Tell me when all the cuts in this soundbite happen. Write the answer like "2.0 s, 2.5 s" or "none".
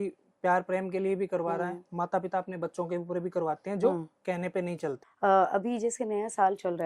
5.1 s